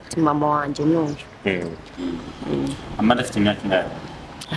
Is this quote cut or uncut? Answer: cut